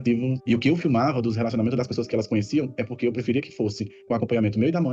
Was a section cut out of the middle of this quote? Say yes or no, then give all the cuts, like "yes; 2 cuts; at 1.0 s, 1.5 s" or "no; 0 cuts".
no; 0 cuts